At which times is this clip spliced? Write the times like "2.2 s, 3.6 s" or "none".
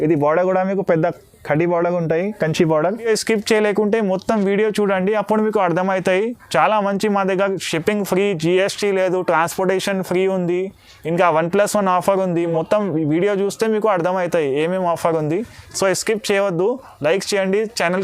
3.0 s, 12.5 s